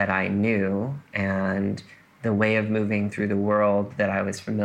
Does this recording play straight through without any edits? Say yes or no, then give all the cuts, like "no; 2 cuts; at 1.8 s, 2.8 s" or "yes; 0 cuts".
yes; 0 cuts